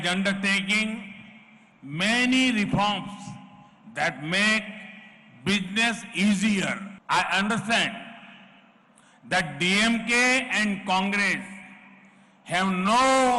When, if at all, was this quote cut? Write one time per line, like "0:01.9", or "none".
0:06.9